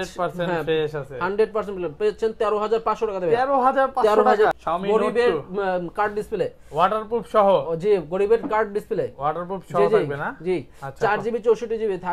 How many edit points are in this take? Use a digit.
1